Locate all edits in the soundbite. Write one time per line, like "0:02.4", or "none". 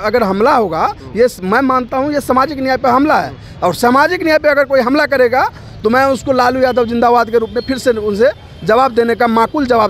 none

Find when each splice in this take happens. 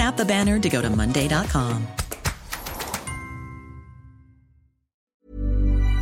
0:05.0

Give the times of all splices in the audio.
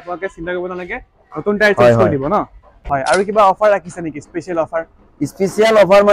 0:02.8

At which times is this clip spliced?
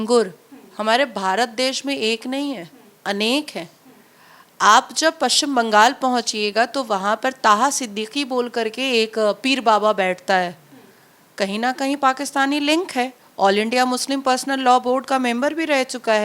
none

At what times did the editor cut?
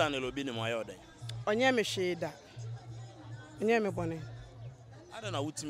none

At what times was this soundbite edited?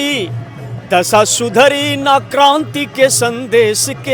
none

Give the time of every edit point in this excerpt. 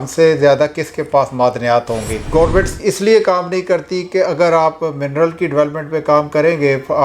0:02.2

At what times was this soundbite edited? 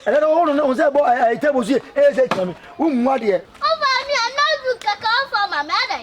0:03.5

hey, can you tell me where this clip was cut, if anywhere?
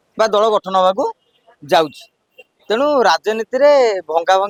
none

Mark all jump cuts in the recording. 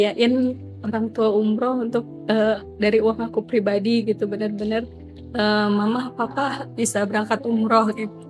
none

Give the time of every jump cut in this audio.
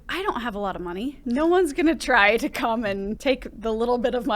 0:01.2
0:03.2

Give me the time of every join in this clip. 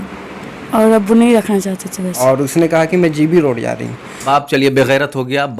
0:02.2
0:04.1

